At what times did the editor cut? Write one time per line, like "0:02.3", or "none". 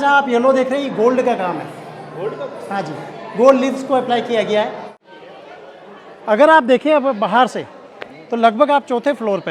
0:04.9